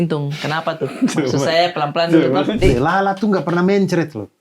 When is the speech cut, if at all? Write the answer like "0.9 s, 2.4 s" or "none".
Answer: 2.6 s